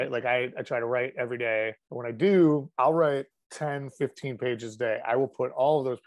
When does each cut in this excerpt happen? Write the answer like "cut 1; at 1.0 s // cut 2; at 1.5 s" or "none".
cut 1; at 1.9 s // cut 2; at 2.7 s

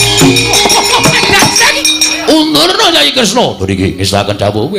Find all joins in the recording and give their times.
cut 1; at 1.8 s

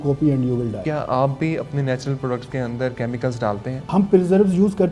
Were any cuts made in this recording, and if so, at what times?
cut 1; at 0.8 s // cut 2; at 3.7 s

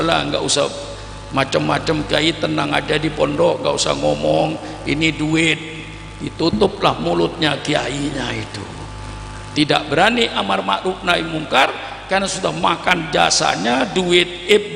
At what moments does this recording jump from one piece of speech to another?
none

